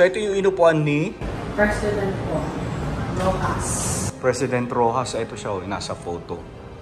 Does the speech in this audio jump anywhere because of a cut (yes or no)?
no